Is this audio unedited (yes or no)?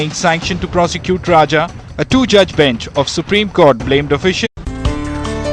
yes